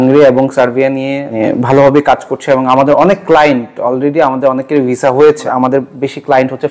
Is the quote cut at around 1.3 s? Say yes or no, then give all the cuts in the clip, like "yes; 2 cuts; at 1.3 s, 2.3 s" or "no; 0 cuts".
yes; 2 cuts; at 1.3 s, 5.5 s